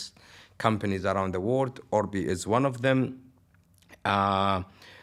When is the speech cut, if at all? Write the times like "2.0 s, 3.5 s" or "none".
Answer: none